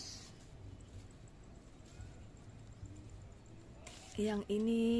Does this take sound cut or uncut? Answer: uncut